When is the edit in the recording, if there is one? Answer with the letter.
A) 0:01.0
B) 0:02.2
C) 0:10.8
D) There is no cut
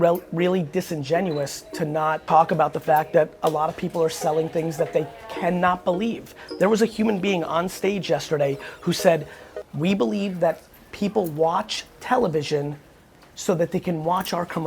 B